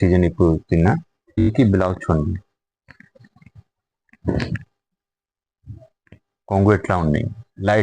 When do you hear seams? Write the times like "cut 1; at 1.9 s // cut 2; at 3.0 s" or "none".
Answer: cut 1; at 1.4 s